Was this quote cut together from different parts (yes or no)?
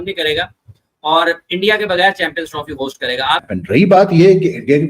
yes